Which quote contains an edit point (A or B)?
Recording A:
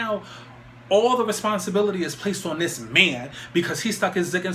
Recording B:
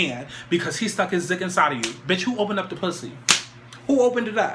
B